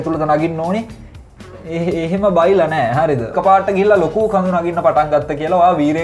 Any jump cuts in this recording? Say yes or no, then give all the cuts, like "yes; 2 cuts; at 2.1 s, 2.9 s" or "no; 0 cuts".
yes; 1 cut; at 3.3 s